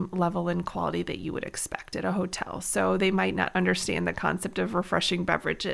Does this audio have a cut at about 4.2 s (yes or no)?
no